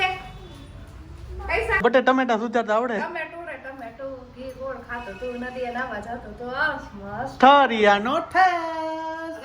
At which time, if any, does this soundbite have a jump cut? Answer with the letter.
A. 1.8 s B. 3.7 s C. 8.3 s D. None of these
A